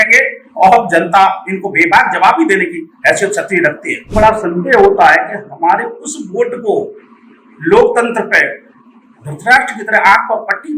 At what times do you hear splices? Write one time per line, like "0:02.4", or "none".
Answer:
0:04.1